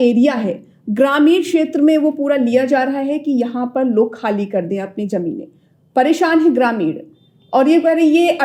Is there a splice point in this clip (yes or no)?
no